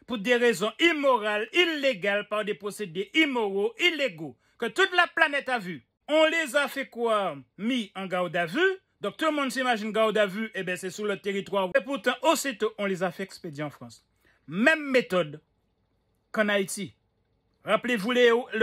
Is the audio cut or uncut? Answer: cut